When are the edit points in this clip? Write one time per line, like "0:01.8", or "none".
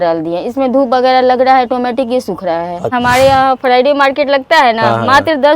0:02.9